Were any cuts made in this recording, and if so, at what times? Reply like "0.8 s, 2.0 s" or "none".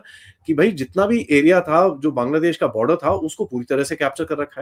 none